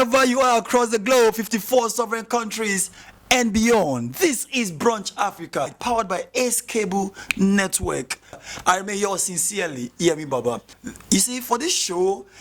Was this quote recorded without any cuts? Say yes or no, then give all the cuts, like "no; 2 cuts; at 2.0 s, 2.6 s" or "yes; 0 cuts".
no; 1 cut; at 10.7 s